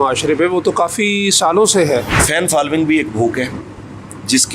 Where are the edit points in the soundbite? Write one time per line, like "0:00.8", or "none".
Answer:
0:02.3